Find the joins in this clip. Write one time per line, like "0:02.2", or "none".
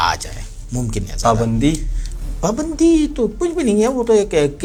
none